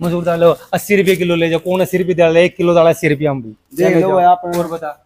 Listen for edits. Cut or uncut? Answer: uncut